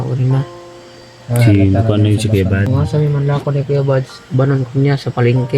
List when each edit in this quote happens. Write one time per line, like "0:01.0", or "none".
0:02.7